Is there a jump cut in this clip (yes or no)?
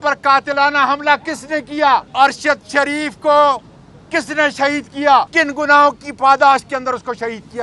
yes